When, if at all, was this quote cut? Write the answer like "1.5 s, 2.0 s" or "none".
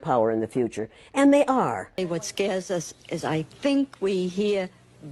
2.0 s